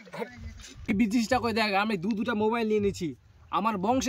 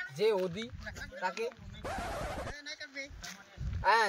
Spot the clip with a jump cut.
first; 1 cut; at 1.0 s

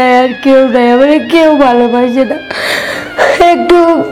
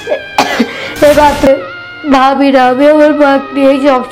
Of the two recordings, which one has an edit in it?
second; 1 cut; at 1.5 s

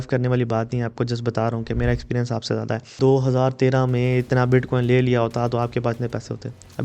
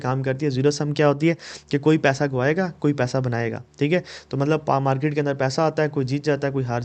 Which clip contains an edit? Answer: first; 1 cut; at 3.0 s

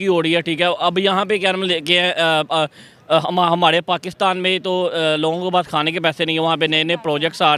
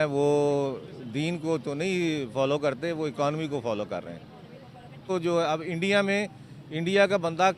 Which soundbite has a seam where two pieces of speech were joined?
second; 1 cut; at 5.1 s

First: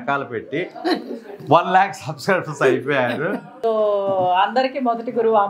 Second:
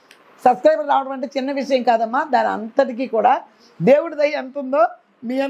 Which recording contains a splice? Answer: first; 1 cut; at 3.5 s

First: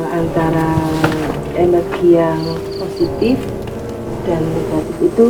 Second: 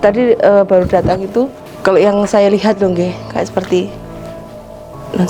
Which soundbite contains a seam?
second; 1 cut; at 1.6 s

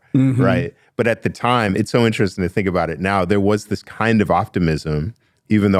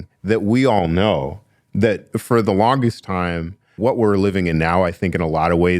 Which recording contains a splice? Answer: second; 1 cut; at 3.7 s

